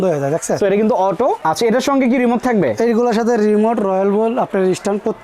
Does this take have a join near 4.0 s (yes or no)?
no